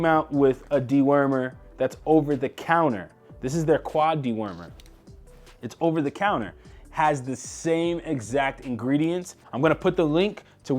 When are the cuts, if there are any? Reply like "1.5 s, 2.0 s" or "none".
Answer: 9.3 s